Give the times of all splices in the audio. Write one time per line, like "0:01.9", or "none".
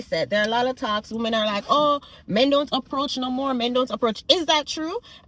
none